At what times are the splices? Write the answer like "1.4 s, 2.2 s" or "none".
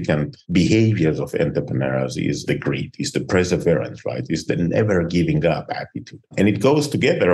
2.4 s